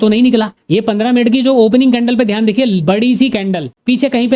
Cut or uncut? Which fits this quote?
uncut